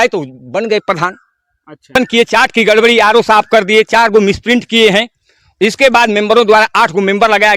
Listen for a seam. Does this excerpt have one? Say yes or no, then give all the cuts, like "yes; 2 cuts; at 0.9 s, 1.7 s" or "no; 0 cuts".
yes; 1 cut; at 2.0 s